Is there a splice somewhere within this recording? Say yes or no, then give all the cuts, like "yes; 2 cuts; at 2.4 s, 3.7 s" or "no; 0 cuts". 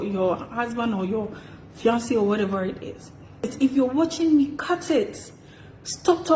yes; 1 cut; at 3.5 s